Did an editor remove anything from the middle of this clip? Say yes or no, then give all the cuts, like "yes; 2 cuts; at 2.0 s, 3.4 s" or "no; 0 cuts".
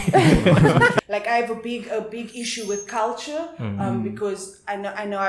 yes; 1 cut; at 1.0 s